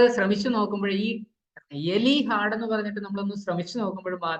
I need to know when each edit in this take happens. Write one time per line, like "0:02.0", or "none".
none